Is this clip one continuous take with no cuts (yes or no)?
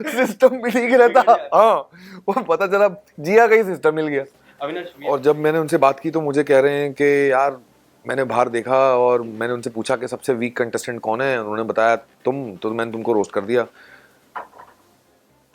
no